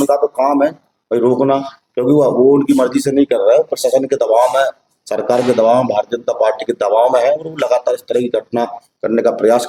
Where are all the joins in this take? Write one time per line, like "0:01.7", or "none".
none

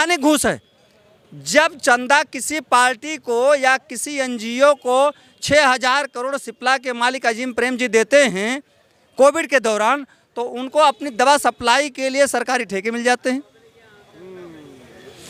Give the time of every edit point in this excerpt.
none

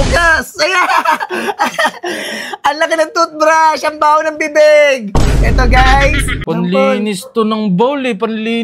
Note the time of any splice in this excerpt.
0:06.3

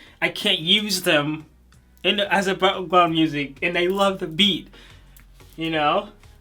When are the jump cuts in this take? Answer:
none

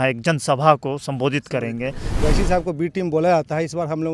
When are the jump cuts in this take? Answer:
0:02.1

